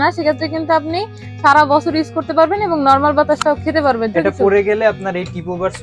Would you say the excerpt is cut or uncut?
cut